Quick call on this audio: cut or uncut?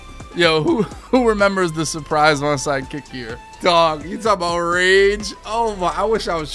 uncut